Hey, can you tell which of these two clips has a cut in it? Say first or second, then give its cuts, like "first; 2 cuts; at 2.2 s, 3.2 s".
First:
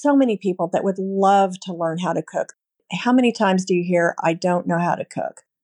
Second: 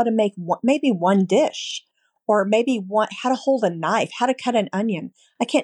first; 1 cut; at 2.5 s